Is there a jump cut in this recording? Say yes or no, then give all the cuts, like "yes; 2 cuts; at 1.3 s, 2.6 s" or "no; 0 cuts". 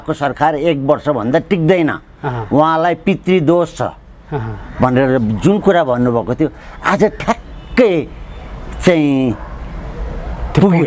no; 0 cuts